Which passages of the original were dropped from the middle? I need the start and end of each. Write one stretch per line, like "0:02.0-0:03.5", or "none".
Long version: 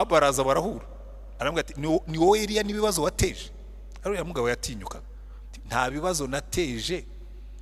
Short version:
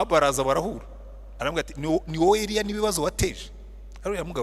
none